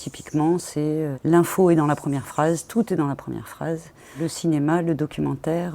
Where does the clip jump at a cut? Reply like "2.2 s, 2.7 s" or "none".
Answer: 1.2 s, 4.1 s